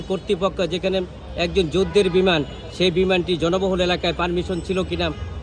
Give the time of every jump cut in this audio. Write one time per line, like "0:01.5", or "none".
none